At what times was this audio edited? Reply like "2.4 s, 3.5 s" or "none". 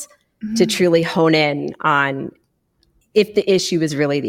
2.9 s